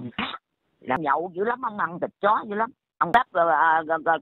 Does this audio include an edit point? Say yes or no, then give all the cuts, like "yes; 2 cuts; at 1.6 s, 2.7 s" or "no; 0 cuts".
yes; 2 cuts; at 1.0 s, 3.1 s